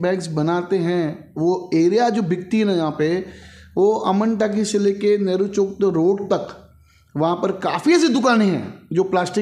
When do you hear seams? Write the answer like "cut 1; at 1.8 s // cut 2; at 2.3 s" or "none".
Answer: none